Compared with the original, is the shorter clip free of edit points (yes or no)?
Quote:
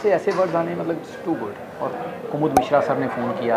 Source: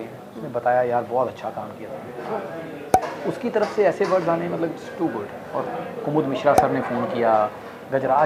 yes